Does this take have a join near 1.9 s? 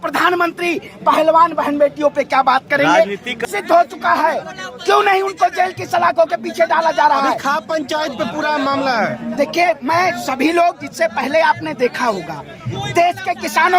no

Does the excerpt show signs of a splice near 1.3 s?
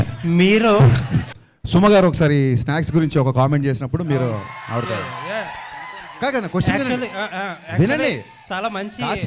yes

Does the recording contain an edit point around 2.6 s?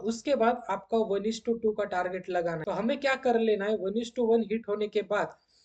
yes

